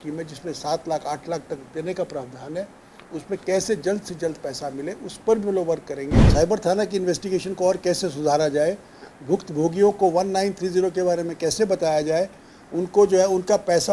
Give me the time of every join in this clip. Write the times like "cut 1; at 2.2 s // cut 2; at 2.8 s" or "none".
cut 1; at 6.2 s